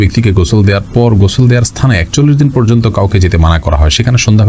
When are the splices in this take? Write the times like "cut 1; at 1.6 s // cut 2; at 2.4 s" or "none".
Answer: none